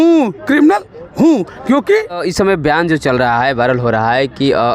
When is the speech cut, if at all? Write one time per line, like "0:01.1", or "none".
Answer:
0:02.3

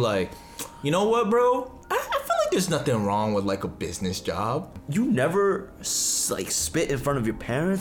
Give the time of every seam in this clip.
0:01.8
0:04.8

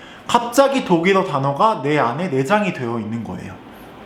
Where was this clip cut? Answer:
none

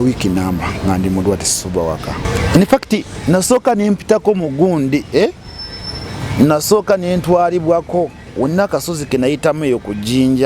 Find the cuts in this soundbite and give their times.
0:02.3

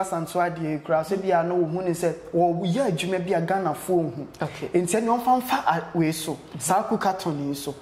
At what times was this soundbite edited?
none

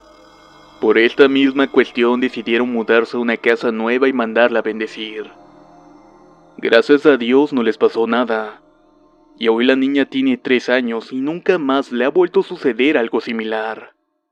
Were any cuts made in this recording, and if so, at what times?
none

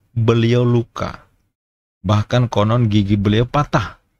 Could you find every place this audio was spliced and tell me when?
none

